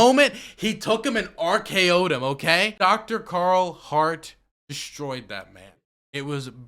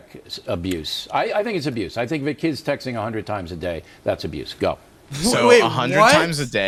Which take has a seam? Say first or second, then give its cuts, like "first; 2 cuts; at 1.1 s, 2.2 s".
first; 1 cut; at 2.7 s